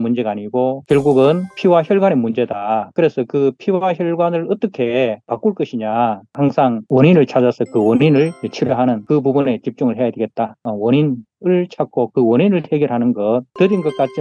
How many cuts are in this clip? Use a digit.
2